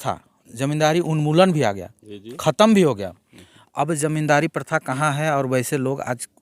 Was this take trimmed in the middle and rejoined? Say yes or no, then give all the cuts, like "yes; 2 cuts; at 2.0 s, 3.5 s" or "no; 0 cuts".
no; 0 cuts